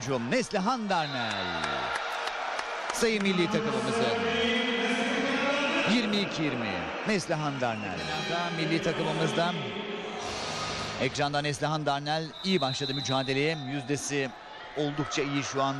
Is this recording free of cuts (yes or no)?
no